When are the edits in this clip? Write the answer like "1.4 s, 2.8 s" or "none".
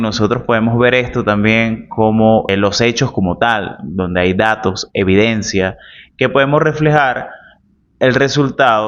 2.5 s